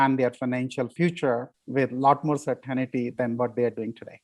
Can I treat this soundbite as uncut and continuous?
no; 3 cuts; at 0.9 s, 1.6 s, 3.1 s

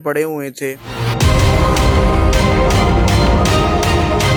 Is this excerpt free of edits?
yes; 0 cuts

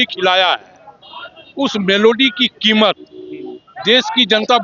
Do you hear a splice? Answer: no; 0 cuts

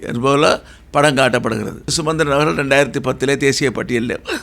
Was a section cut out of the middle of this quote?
yes; 1 cut; at 2.0 s

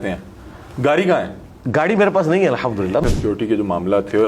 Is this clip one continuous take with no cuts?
no; 1 cut; at 3.0 s

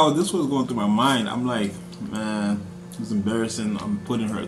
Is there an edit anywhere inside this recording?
no; 0 cuts

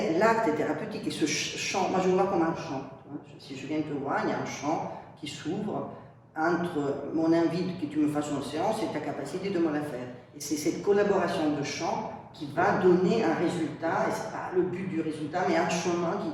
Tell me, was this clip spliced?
no; 0 cuts

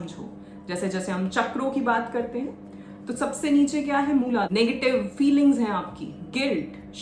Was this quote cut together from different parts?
yes; 1 cut; at 4.5 s

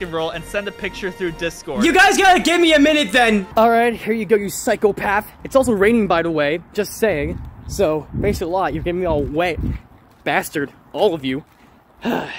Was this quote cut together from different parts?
yes; 2 cuts; at 1.8 s, 3.5 s

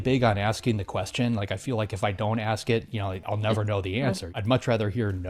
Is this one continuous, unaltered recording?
no; 2 cuts; at 3.2 s, 4.4 s

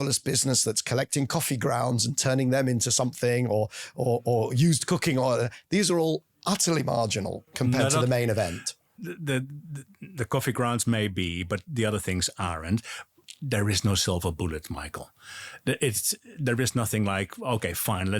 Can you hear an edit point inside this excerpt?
yes; 1 cut; at 13.2 s

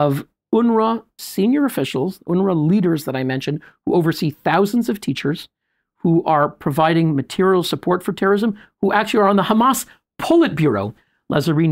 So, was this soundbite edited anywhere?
yes; 1 cut; at 1.2 s

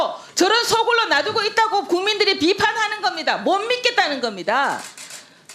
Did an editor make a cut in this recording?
no; 0 cuts

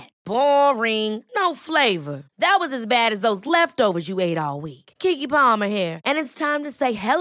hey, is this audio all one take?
yes; 0 cuts

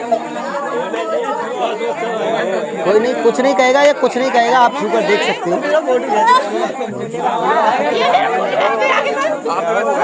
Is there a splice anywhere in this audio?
no; 0 cuts

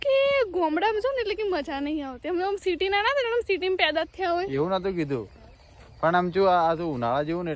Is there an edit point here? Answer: no; 0 cuts

